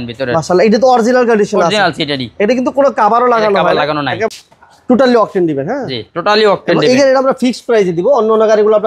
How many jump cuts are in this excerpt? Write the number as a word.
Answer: one